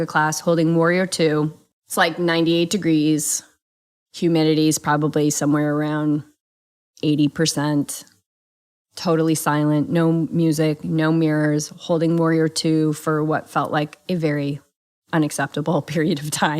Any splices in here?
yes; 1 cut; at 1.6 s

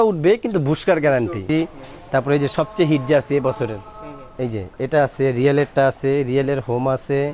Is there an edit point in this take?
yes; 1 cut; at 1.4 s

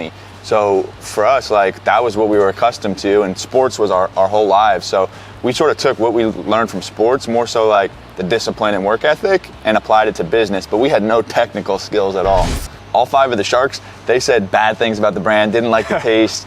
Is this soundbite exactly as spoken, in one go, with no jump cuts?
no; 1 cut; at 12.8 s

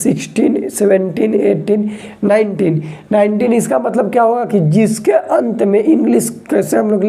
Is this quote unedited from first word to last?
yes; 0 cuts

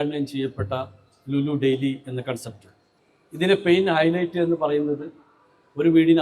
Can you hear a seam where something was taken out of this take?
no; 0 cuts

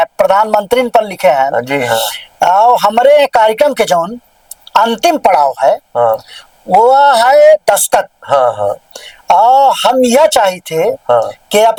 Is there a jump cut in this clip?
no; 0 cuts

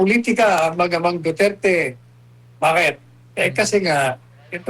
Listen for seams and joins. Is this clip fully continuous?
yes; 0 cuts

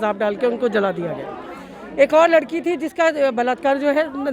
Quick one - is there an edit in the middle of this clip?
no; 0 cuts

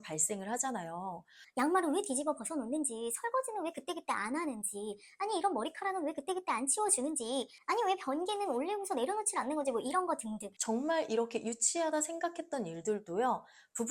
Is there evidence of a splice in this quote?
yes; 1 cut; at 1.3 s

